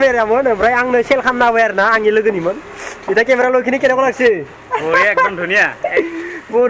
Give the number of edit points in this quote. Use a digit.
0